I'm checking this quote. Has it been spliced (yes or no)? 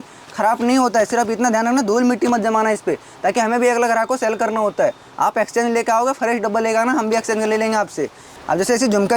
no